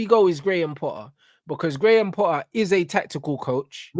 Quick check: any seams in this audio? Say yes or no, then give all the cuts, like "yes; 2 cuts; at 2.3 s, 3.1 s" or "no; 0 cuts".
no; 0 cuts